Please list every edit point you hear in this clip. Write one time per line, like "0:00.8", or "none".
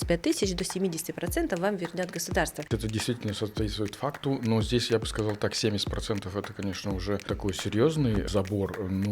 0:02.7
0:07.3
0:08.3